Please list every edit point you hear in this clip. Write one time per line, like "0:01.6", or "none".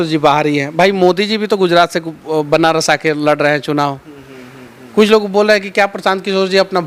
none